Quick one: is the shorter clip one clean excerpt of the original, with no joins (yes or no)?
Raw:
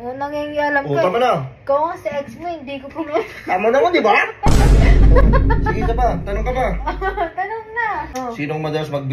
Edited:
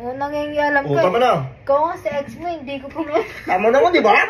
yes